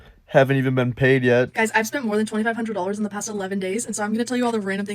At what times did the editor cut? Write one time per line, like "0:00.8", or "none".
0:01.5